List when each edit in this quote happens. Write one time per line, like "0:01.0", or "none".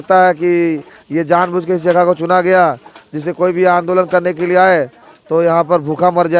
none